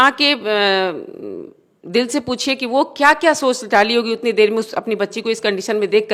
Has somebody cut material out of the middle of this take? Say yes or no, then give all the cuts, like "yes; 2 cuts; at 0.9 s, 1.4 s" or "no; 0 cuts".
no; 0 cuts